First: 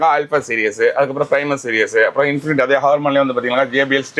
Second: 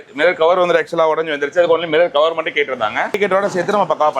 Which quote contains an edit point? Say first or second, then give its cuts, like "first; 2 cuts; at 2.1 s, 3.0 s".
second; 1 cut; at 3.1 s